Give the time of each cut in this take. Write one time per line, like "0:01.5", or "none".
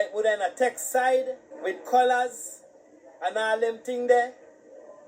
0:01.4